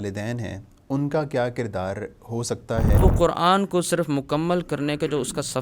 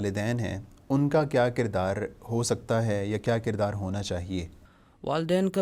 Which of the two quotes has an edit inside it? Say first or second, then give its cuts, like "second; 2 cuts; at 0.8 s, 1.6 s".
first; 1 cut; at 3.0 s